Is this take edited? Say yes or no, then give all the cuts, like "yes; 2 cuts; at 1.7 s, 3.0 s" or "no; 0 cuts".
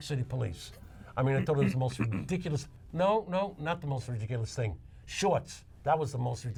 no; 0 cuts